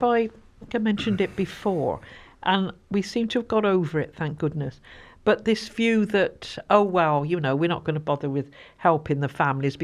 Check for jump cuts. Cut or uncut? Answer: uncut